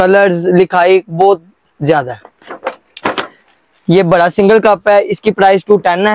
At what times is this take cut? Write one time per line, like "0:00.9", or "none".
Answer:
none